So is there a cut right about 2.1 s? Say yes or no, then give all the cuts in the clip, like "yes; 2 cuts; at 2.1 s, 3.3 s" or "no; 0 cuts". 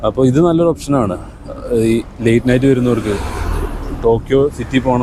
no; 0 cuts